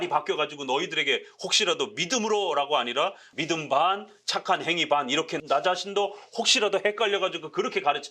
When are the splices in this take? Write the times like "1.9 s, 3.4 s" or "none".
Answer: 3.3 s, 5.3 s